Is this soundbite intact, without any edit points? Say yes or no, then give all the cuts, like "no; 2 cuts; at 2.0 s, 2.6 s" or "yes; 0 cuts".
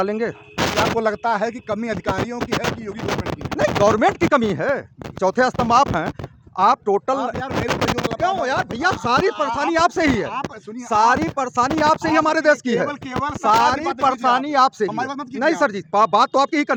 yes; 0 cuts